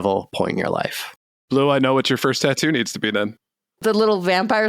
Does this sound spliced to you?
yes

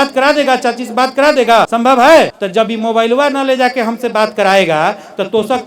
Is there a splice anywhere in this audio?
yes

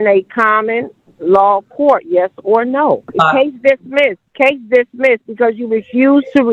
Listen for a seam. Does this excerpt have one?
yes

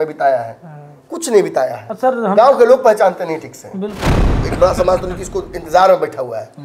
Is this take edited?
yes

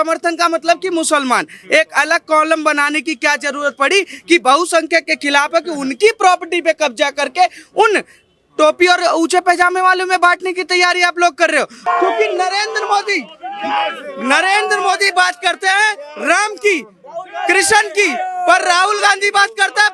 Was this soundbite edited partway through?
yes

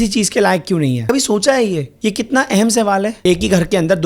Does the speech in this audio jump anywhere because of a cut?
yes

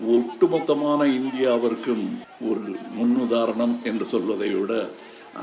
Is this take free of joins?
no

